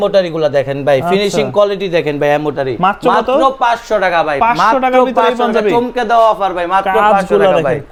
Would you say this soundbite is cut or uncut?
uncut